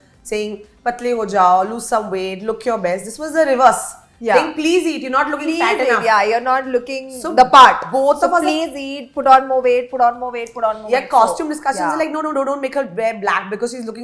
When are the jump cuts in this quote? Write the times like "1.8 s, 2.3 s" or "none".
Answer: none